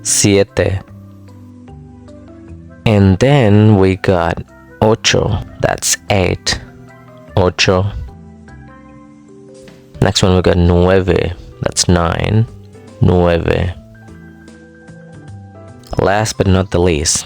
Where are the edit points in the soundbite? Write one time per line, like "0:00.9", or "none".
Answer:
0:00.8
0:02.5
0:08.0
0:10.0